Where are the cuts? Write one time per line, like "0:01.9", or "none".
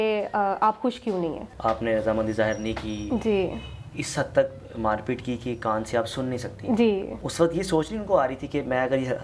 0:01.5
0:07.2